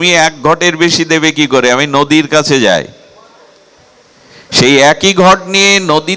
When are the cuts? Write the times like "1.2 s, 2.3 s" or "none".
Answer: none